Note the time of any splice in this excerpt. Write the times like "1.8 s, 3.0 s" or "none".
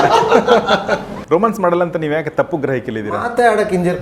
1.1 s